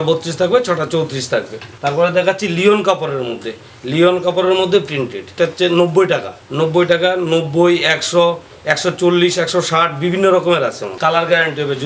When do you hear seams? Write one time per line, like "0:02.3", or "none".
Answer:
0:01.6
0:05.3
0:10.9